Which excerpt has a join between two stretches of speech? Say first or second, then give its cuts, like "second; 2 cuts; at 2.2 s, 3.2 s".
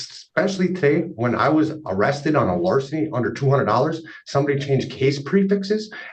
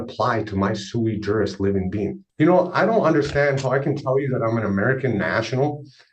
second; 1 cut; at 2.1 s